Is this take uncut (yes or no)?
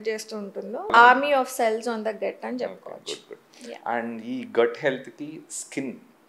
no